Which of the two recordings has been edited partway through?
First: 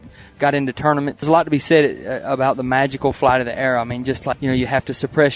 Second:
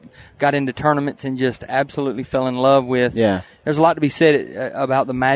first; 2 cuts; at 1.2 s, 4.3 s

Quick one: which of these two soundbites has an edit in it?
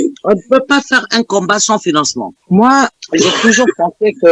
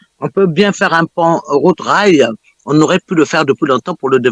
first; 1 cut; at 2.3 s

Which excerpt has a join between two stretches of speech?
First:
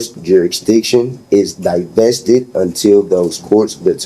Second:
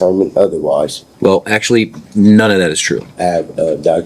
second; 2 cuts; at 1.0 s, 3.1 s

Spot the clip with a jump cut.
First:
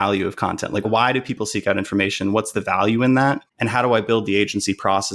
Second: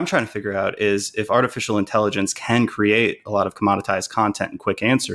first; 2 cuts; at 0.8 s, 3.5 s

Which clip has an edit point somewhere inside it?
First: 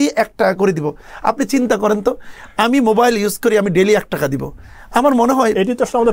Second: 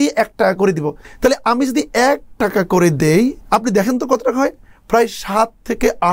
second; 2 cuts; at 1.0 s, 3.4 s

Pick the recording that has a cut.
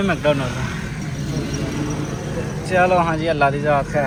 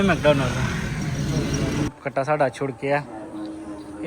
second; 1 cut; at 1.9 s

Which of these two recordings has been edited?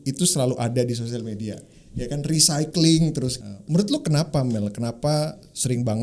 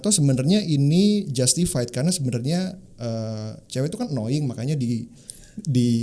first; 1 cut; at 3.5 s

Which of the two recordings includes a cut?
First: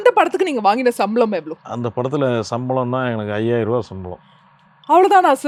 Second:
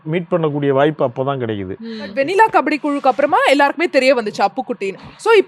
second; 1 cut; at 2.1 s

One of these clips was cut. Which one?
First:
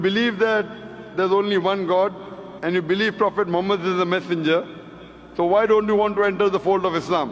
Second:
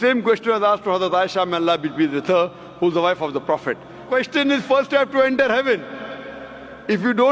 second; 1 cut; at 4.1 s

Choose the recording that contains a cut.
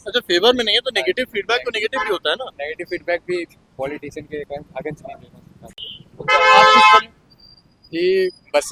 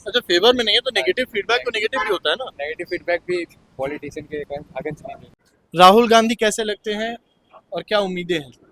second; 1 cut; at 5.6 s

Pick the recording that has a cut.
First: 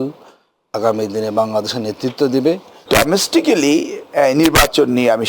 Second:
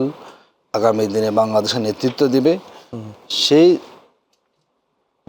first; 1 cut; at 2.9 s

